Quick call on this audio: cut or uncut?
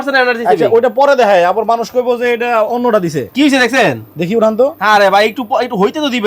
uncut